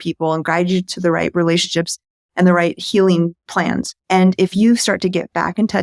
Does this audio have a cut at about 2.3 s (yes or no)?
no